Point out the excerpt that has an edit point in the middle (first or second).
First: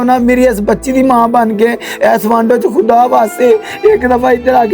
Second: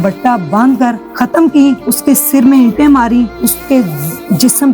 second